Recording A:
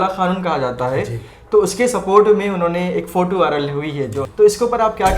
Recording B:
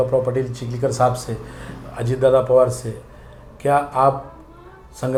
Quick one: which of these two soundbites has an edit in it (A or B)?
A